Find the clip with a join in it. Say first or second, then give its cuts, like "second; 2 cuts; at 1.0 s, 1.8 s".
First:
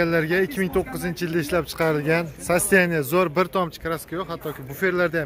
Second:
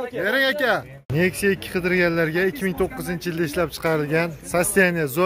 second; 1 cut; at 1.0 s